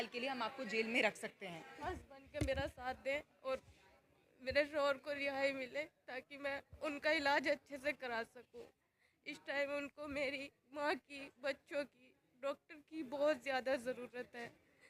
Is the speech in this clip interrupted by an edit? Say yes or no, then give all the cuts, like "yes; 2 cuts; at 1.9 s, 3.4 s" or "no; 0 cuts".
yes; 1 cut; at 1.8 s